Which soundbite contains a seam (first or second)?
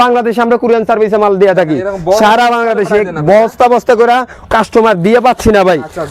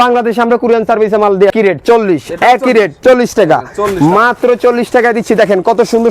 second